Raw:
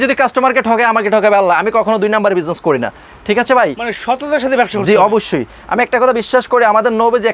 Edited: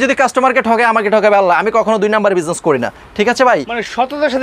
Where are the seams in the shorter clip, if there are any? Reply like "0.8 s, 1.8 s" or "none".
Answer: 3.0 s